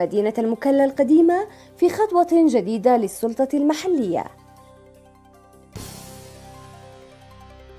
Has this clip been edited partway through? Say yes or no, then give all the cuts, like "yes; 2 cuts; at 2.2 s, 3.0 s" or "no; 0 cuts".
no; 0 cuts